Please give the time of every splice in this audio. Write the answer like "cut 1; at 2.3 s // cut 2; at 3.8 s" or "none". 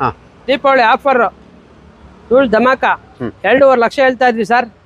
none